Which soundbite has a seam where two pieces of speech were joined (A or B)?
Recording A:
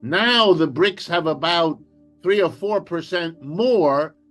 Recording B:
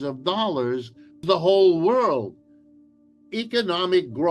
B